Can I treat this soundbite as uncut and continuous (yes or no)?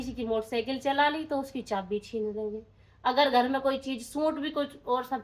yes